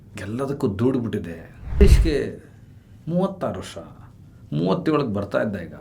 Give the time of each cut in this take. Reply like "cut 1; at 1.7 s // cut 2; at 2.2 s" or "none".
cut 1; at 1.8 s